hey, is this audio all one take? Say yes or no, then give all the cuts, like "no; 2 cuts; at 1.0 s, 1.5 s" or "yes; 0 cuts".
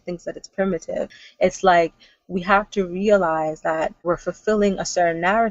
no; 2 cuts; at 1.2 s, 4.0 s